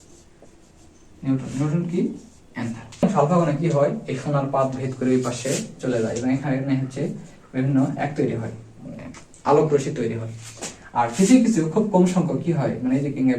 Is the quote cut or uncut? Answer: cut